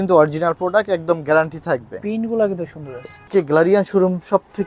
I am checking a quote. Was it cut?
yes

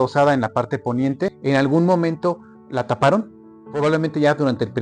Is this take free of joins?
no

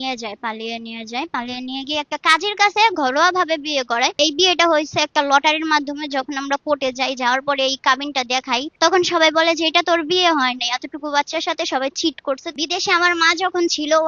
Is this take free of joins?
no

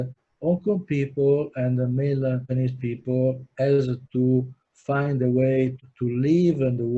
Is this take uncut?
yes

